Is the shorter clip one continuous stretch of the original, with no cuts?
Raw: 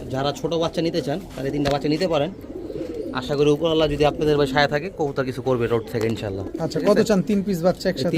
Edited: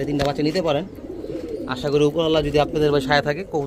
yes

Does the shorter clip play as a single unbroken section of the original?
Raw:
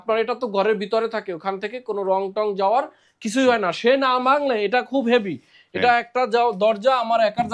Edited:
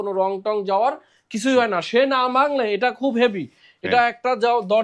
yes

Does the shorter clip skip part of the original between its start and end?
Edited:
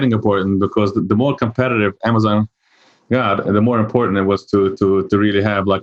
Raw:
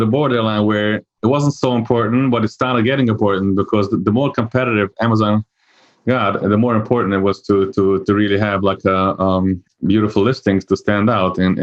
no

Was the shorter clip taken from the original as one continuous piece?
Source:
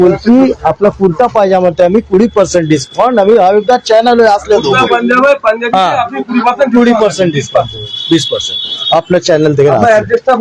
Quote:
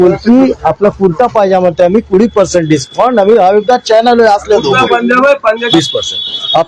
no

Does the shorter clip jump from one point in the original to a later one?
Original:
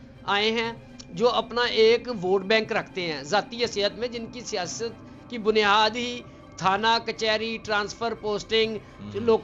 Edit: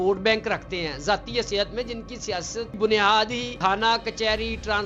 yes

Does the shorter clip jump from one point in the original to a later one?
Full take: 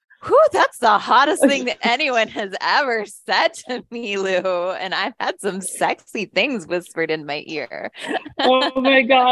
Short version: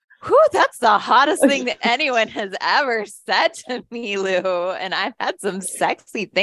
no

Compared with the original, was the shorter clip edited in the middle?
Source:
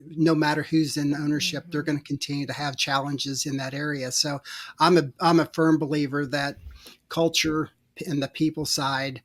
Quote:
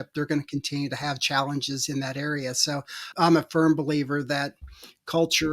yes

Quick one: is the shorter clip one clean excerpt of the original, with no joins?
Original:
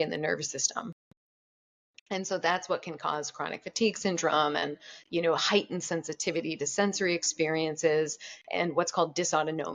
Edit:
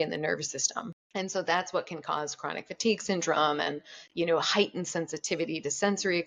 no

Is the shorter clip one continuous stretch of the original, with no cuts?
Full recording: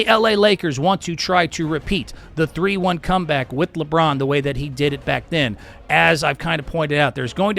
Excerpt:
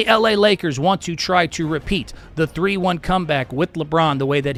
yes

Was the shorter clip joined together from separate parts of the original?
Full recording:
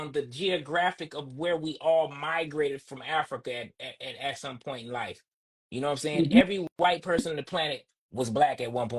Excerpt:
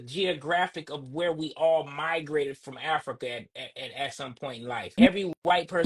yes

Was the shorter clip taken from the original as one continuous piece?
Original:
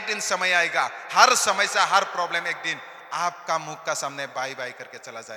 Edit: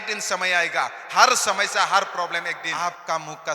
no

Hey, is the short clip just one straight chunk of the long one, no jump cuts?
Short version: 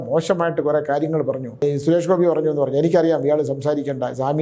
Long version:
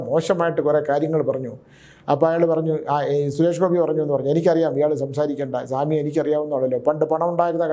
no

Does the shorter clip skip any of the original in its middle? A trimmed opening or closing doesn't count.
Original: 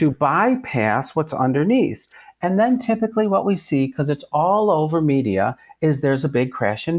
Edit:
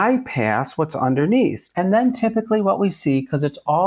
yes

